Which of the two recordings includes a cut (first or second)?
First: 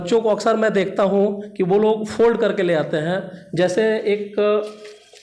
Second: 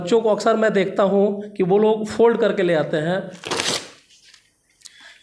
second